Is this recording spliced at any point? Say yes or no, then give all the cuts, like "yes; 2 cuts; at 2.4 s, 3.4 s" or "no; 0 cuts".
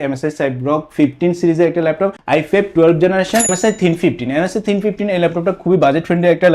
yes; 2 cuts; at 2.2 s, 3.5 s